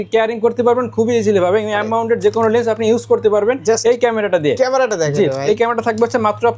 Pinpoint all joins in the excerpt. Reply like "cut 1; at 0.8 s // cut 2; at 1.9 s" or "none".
none